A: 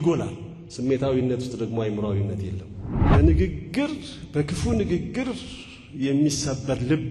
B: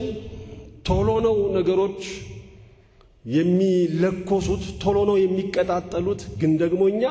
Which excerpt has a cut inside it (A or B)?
A